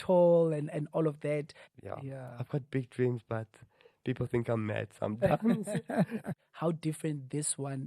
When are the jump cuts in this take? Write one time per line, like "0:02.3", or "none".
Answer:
0:01.6
0:06.4